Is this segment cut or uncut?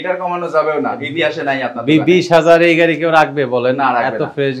uncut